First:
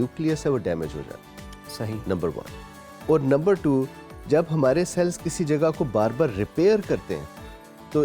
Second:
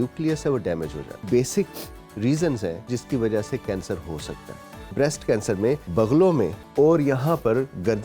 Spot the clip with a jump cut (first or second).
second